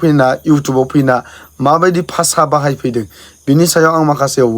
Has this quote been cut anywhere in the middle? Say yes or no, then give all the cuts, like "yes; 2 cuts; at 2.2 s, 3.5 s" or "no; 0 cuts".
no; 0 cuts